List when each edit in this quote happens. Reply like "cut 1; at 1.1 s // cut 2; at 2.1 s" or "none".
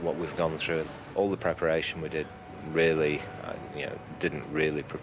cut 1; at 1.0 s